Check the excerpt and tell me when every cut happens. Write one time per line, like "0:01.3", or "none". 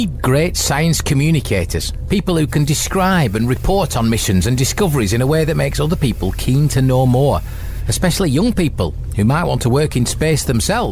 none